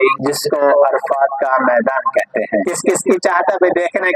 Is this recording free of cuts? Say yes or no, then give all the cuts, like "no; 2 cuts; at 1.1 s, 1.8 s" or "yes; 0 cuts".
yes; 0 cuts